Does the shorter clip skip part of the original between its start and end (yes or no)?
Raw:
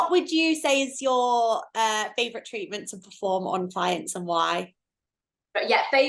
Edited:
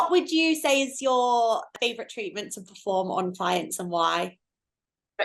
yes